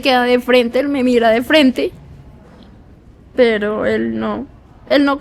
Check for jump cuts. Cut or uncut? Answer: uncut